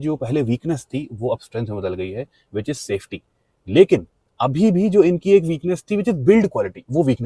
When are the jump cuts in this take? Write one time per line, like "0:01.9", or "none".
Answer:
none